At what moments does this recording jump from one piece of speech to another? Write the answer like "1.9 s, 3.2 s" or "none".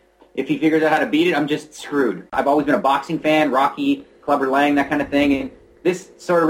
2.3 s